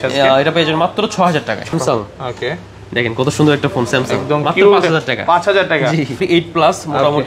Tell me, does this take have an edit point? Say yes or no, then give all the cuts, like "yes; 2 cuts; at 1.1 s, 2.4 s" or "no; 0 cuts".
yes; 2 cuts; at 1.7 s, 6.2 s